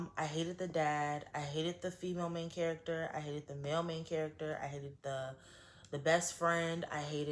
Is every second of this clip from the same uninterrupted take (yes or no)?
yes